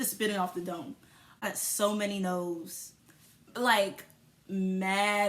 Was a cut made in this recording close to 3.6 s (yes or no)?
no